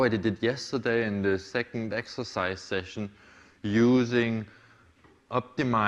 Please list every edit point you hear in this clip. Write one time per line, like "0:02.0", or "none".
none